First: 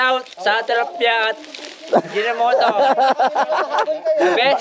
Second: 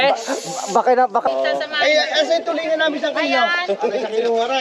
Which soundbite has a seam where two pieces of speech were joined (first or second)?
second